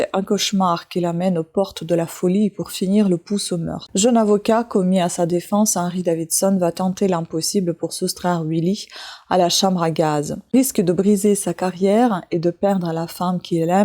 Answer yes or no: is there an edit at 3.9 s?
no